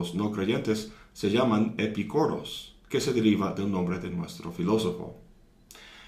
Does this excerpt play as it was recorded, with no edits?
yes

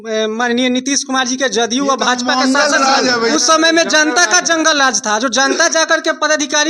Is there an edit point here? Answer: yes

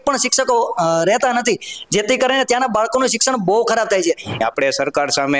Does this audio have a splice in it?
yes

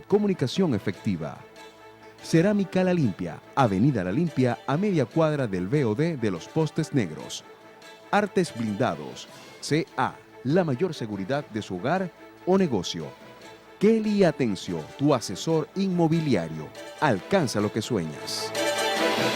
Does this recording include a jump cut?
yes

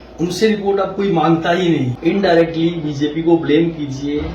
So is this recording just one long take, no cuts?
no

